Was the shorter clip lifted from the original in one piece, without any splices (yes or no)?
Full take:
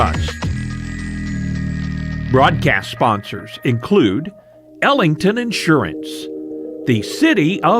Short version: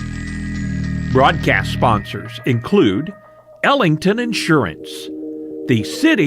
no